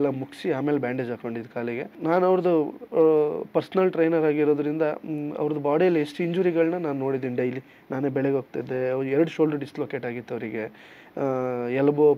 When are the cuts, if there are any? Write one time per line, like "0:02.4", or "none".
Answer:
0:01.9